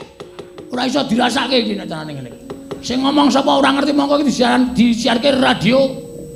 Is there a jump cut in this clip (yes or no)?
no